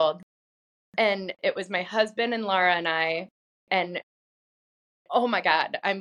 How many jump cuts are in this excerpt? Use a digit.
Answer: 0